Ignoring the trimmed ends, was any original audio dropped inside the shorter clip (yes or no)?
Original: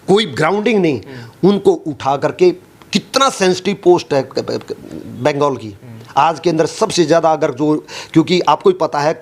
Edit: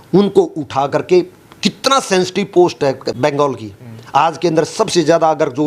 yes